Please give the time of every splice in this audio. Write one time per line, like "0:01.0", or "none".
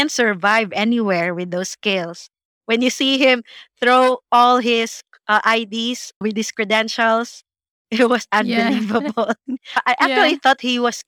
0:09.8

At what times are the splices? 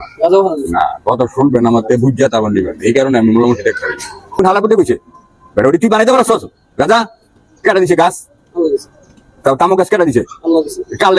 0:04.2

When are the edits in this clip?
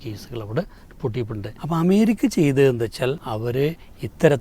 0:01.5
0:03.3

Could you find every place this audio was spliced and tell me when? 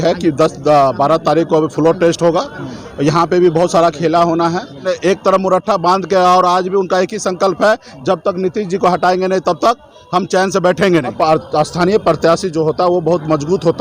0:04.9
0:11.1

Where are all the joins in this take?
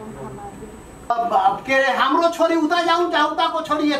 0:01.1

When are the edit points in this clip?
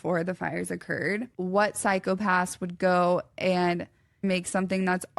0:01.3

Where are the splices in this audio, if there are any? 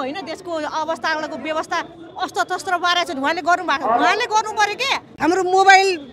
0:05.0

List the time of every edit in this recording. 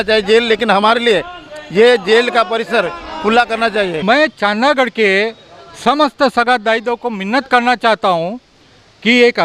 0:04.0

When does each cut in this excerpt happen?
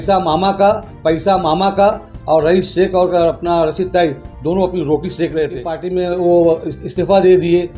0:05.8

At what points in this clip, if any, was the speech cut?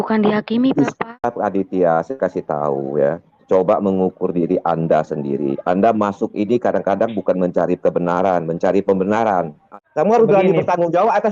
0:01.2
0:09.6

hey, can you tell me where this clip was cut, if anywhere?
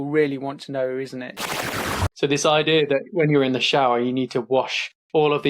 0:01.5

